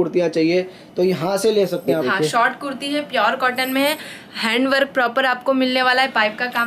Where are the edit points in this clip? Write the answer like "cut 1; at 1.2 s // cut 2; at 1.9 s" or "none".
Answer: cut 1; at 2.0 s